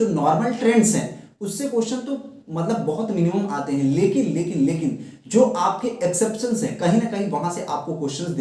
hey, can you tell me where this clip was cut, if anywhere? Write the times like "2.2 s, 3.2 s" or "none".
none